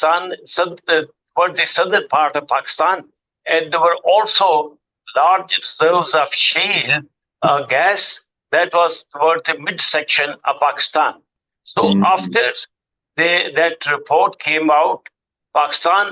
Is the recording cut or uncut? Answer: uncut